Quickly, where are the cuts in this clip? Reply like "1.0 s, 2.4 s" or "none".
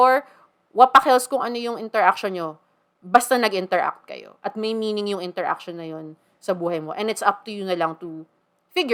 none